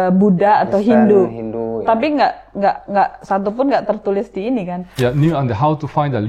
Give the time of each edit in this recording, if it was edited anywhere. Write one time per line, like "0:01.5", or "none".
0:05.0